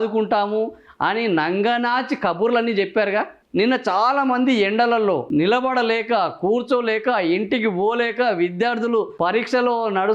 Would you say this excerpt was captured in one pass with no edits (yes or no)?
no